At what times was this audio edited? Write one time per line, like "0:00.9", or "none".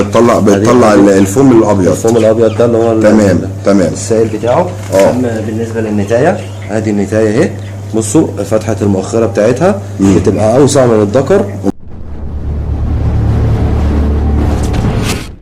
0:11.7

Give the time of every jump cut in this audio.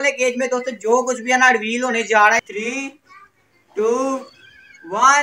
0:02.4

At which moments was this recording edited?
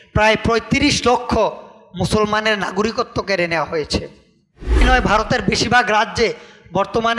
0:04.8

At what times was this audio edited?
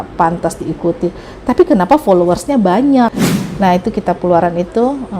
0:03.2

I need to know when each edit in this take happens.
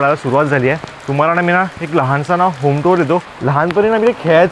0:00.9
0:03.3

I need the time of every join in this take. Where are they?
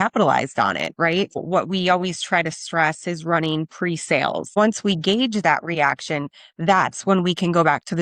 0:01.4
0:04.6

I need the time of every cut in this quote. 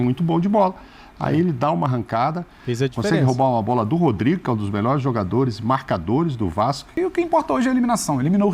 0:06.9

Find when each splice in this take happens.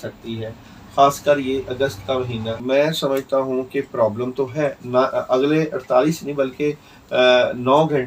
0:02.6

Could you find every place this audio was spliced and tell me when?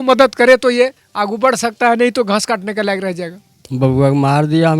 0:03.4

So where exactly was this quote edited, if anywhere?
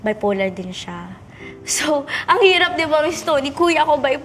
none

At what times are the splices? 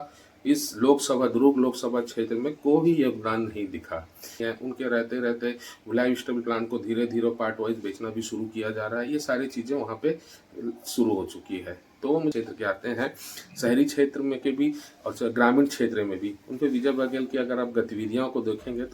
0:04.4
0:12.3

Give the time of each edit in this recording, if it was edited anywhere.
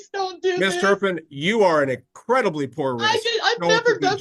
none

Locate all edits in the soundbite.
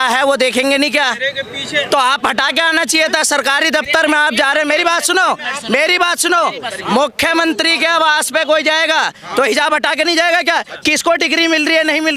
none

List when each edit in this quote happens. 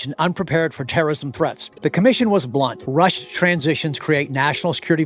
0:01.7
0:02.8

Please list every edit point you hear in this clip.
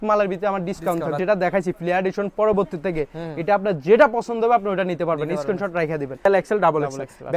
0:01.2
0:06.2

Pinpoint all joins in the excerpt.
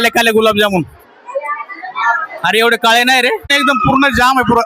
0:03.6

